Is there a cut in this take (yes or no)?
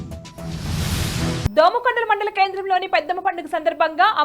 yes